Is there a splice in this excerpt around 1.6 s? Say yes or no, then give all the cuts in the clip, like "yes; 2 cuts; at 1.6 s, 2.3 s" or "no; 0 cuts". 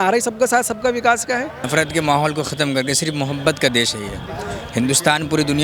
yes; 1 cut; at 1.6 s